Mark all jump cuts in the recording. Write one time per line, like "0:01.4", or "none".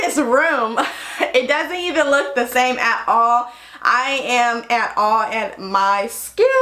none